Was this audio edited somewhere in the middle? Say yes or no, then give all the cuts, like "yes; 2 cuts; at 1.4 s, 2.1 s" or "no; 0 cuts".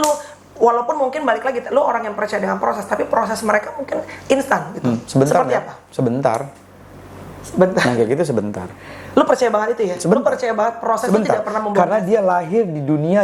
no; 0 cuts